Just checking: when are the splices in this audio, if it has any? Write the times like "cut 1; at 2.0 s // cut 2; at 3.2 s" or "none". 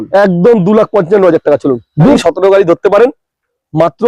cut 1; at 2.2 s